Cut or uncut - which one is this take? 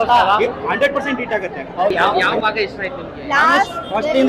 cut